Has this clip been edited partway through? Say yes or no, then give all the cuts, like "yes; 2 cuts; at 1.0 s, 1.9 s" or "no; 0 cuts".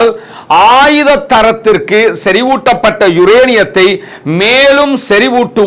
no; 0 cuts